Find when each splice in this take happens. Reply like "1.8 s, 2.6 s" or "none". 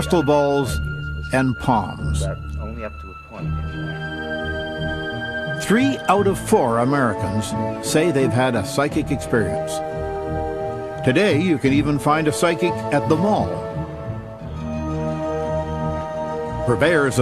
10.9 s